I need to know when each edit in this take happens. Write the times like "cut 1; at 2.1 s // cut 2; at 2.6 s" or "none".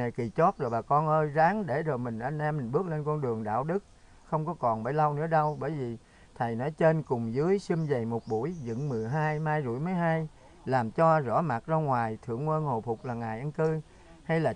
none